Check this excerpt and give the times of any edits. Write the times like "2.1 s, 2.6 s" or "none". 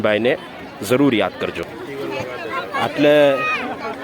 1.7 s